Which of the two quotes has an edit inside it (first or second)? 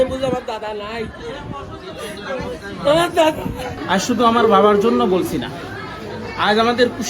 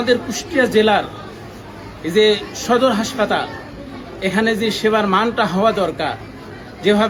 first